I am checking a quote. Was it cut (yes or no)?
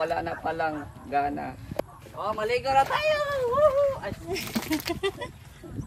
yes